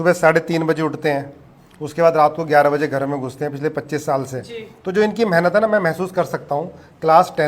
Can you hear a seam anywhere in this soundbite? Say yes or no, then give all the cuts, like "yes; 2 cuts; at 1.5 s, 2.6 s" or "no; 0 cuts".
no; 0 cuts